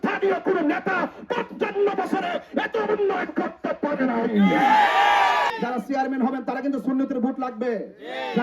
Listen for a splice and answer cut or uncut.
cut